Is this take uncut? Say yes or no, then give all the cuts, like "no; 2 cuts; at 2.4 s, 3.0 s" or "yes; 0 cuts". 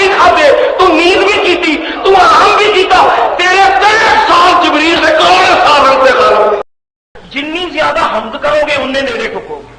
no; 1 cut; at 6.6 s